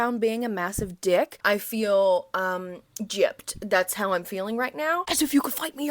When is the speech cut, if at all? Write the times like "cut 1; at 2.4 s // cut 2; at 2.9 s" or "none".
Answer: cut 1; at 1.4 s // cut 2; at 5.0 s